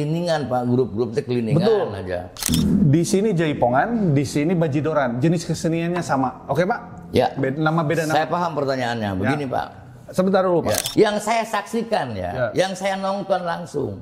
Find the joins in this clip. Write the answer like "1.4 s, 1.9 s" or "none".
2.5 s, 10.8 s